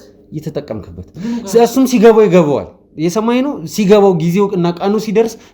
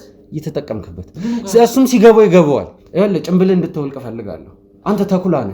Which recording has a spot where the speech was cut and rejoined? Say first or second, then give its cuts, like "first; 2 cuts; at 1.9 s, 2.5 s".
second; 1 cut; at 2.8 s